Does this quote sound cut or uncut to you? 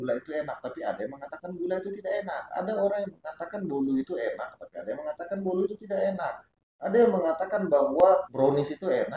uncut